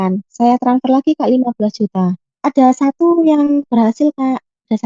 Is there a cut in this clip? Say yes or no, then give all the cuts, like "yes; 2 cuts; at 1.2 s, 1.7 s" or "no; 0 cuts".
yes; 1 cut; at 2.4 s